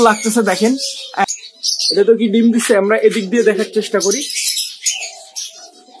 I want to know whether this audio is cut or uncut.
cut